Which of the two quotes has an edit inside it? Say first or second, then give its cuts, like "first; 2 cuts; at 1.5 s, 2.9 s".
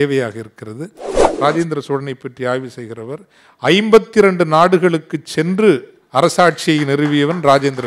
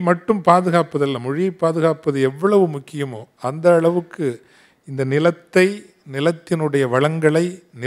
first; 1 cut; at 1.2 s